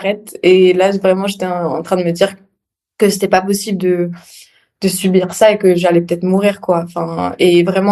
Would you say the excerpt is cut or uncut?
uncut